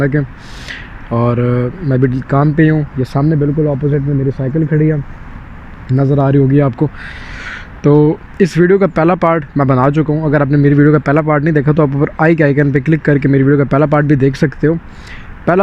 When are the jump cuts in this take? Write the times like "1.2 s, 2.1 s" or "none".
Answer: none